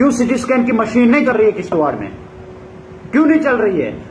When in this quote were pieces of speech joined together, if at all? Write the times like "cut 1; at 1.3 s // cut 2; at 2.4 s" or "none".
cut 1; at 1.3 s